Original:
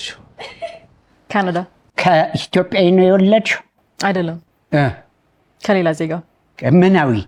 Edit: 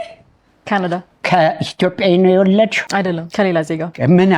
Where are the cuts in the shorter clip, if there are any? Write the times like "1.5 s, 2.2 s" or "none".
1.1 s, 3.3 s